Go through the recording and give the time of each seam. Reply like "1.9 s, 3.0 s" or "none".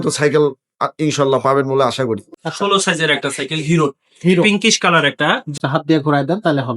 2.3 s, 5.6 s